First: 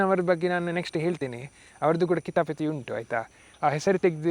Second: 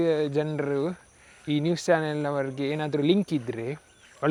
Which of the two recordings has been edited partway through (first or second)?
first